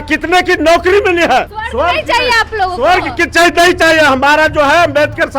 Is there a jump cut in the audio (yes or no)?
yes